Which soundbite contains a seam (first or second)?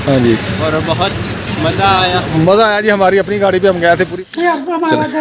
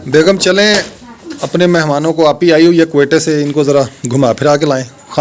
first